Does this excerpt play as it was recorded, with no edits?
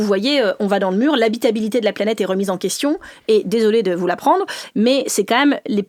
yes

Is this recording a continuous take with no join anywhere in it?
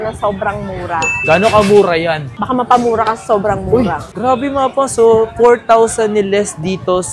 no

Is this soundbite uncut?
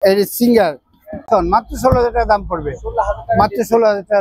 no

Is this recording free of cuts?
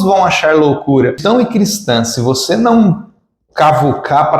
no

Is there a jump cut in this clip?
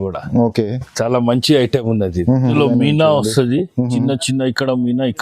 yes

